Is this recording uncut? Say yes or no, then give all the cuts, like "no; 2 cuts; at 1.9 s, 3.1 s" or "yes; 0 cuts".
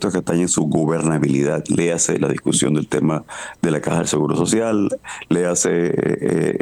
yes; 0 cuts